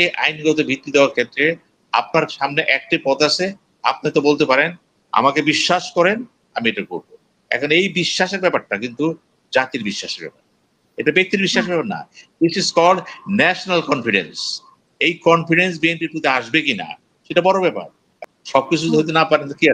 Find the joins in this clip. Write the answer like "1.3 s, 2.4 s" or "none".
18.1 s